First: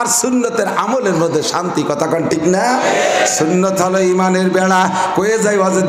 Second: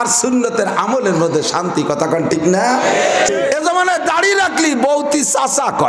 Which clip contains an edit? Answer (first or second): second